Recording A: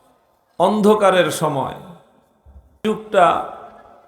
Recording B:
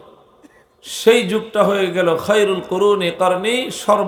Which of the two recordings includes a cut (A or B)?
A